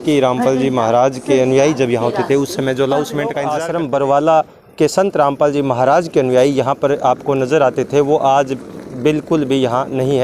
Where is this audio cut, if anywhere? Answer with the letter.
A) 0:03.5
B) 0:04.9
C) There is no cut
A